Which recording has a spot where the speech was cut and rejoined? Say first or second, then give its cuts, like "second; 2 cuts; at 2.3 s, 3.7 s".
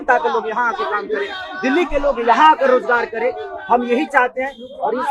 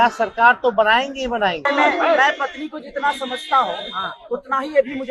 second; 1 cut; at 1.7 s